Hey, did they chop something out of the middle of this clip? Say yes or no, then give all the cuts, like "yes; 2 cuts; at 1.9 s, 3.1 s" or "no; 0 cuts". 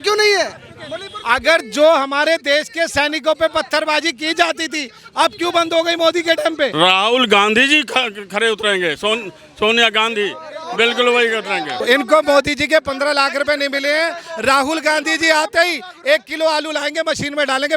yes; 2 cuts; at 6.7 s, 11.8 s